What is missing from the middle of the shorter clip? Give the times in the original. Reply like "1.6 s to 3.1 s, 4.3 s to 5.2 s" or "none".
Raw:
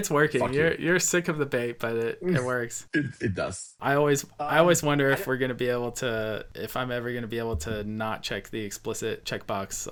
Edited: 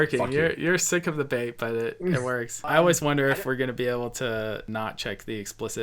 2.8 s to 4.4 s, 6.5 s to 7.9 s